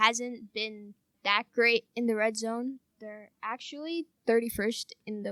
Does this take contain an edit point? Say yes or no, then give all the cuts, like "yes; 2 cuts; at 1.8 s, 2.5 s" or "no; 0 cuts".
no; 0 cuts